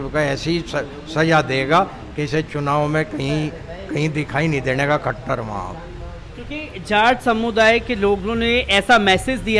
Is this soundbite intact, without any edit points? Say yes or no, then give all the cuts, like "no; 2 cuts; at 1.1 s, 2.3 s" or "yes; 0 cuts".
yes; 0 cuts